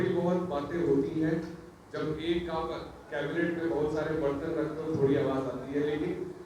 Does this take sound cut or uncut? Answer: uncut